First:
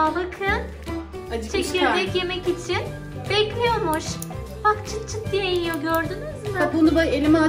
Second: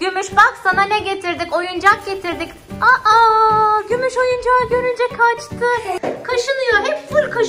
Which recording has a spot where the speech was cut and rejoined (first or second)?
second